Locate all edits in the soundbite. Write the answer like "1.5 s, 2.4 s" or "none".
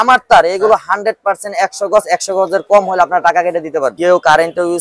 3.9 s